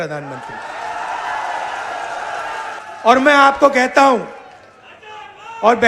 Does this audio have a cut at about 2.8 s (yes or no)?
yes